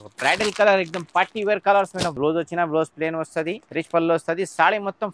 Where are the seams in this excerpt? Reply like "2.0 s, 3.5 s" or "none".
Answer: 2.2 s, 3.6 s